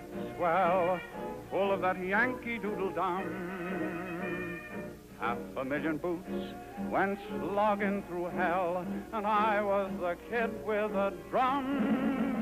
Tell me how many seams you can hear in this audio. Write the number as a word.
zero